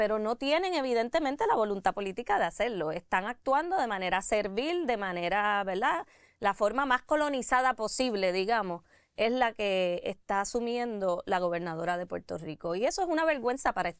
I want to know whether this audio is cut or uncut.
uncut